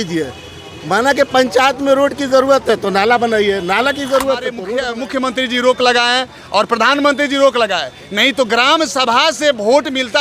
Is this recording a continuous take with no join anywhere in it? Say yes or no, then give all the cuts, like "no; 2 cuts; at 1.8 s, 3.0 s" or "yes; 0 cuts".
no; 1 cut; at 4.6 s